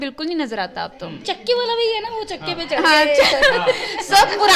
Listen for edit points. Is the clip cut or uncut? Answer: uncut